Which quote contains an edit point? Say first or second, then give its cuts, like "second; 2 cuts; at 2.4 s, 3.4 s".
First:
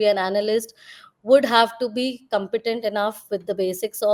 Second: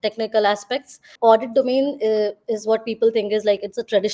second; 1 cut; at 1.1 s